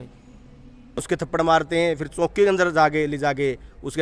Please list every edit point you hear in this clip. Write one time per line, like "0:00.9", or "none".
0:01.0

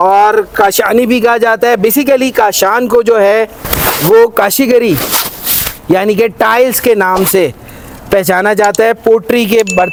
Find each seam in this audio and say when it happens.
none

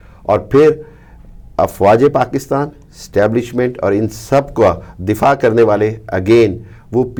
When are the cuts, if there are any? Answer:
none

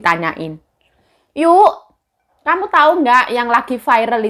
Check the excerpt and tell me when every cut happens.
none

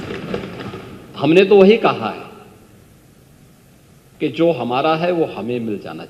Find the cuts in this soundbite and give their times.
none

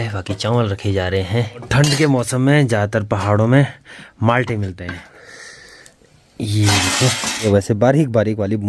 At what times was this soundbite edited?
0:01.7
0:05.1
0:07.4

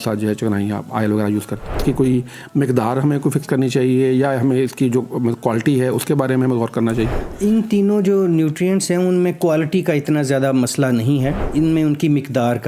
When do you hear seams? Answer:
0:01.7

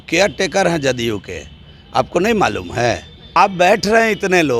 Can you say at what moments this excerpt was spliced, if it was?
0:03.3

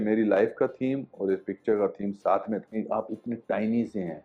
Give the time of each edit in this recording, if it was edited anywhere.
0:02.6

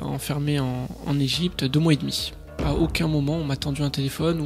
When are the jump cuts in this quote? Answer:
0:02.6

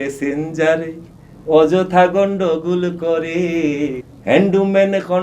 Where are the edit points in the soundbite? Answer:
0:04.0

